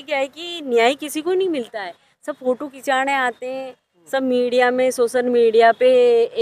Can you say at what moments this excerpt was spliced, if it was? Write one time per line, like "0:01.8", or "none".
none